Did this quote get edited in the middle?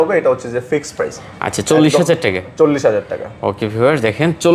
no; 0 cuts

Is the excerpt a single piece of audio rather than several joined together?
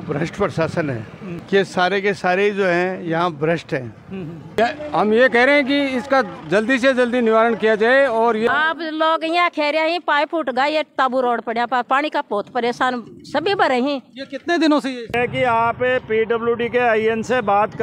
no; 4 cuts; at 1.3 s, 4.6 s, 8.5 s, 15.1 s

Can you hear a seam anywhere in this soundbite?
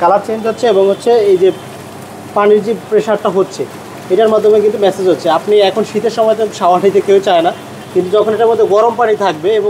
no; 0 cuts

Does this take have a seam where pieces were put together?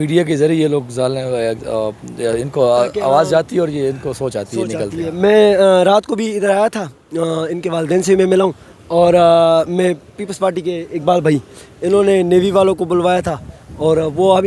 no; 0 cuts

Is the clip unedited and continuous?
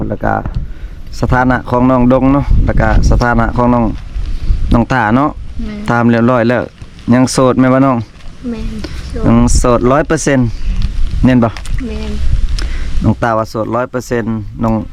yes; 0 cuts

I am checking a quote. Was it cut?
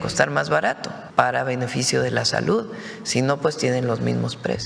yes; 1 cut; at 1.0 s

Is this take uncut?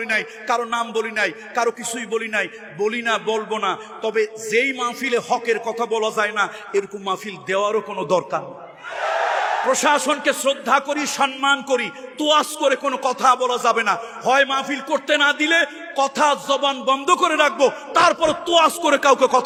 yes; 0 cuts

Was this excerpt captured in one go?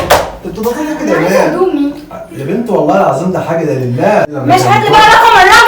no; 1 cut; at 4.2 s

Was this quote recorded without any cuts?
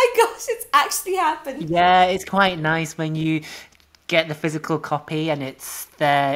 no; 1 cut; at 1.5 s

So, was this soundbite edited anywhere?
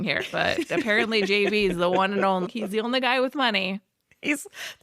yes; 1 cut; at 2.5 s

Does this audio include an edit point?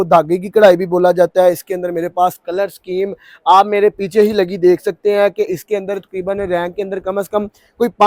no; 0 cuts

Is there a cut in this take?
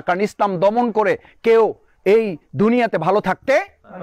no; 0 cuts

